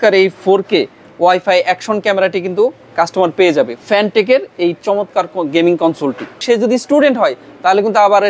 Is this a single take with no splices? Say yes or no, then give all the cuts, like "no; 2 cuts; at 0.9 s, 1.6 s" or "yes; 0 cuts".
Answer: no; 2 cuts; at 3.8 s, 6.4 s